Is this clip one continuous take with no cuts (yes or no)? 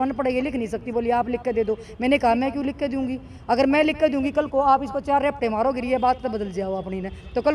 yes